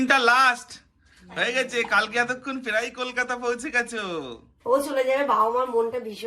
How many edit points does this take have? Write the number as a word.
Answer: one